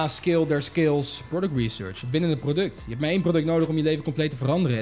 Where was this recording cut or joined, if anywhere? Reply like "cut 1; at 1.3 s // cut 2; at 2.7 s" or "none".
cut 1; at 1.3 s